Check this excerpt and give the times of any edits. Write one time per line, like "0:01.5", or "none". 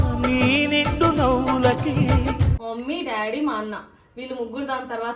0:02.6